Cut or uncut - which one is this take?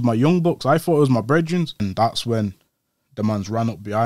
cut